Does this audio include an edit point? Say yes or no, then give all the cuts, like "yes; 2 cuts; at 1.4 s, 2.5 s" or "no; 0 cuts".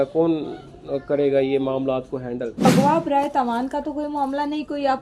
yes; 1 cut; at 2.6 s